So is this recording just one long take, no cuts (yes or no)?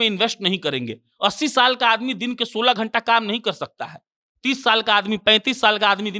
yes